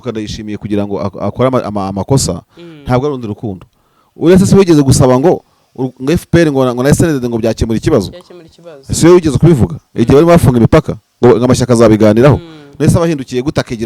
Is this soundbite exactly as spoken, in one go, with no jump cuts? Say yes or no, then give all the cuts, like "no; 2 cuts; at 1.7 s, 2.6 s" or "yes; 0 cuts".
yes; 0 cuts